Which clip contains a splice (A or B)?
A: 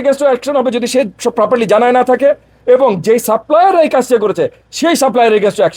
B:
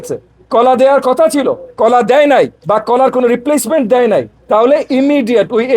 B